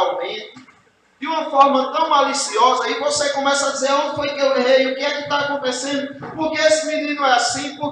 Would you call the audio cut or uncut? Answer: uncut